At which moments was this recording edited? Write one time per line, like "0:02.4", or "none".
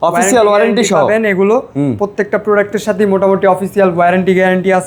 none